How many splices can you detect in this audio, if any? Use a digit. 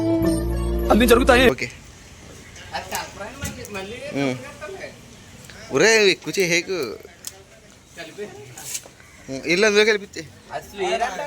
1